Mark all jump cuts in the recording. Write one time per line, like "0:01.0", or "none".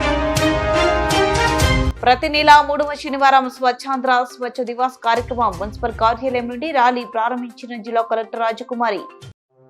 0:01.4